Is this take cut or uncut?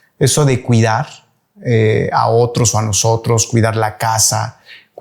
uncut